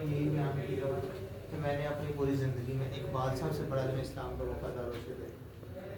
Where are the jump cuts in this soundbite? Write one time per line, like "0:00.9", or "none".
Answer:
none